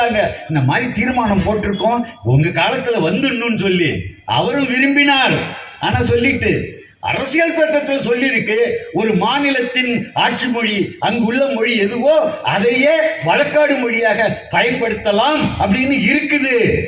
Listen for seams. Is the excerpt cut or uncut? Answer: uncut